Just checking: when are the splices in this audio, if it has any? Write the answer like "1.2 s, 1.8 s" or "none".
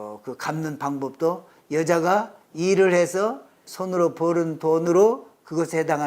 3.7 s, 4.8 s